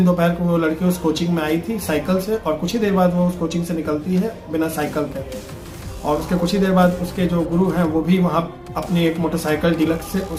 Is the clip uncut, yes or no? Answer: yes